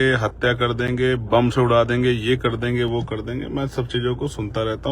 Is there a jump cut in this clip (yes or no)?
no